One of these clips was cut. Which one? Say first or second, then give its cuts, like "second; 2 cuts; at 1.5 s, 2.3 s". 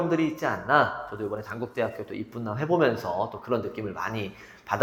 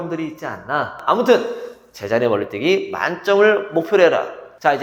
second; 1 cut; at 1.0 s